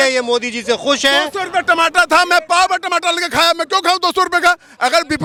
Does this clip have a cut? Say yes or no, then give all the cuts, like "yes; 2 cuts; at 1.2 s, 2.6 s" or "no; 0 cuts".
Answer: no; 0 cuts